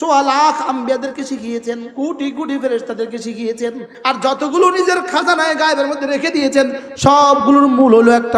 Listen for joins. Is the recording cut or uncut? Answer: cut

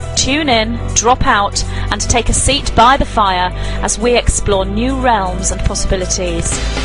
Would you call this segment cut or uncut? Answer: uncut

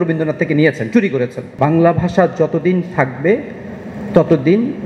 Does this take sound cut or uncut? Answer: cut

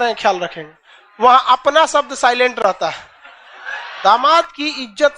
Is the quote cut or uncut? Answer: cut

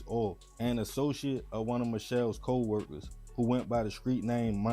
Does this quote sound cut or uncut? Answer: uncut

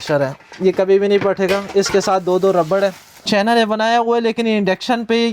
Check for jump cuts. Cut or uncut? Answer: cut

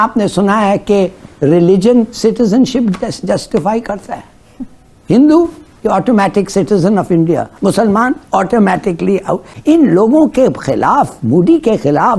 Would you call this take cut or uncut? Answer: uncut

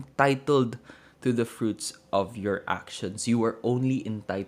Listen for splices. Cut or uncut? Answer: uncut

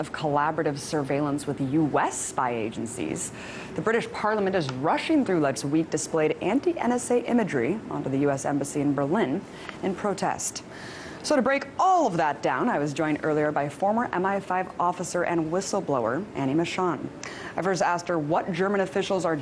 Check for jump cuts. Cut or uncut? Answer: uncut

